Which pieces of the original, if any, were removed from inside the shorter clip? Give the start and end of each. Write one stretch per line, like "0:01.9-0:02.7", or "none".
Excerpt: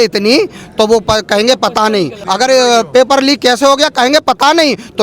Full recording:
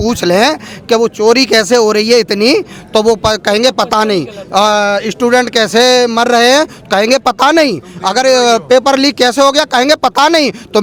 0:04.3-0:07.9